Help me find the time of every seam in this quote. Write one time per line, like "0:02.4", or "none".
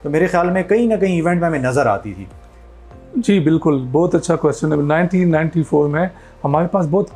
none